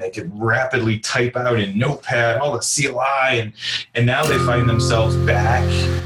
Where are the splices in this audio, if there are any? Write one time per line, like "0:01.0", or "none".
none